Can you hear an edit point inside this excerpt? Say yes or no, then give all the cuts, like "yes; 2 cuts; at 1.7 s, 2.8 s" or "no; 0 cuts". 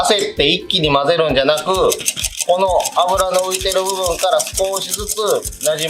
no; 0 cuts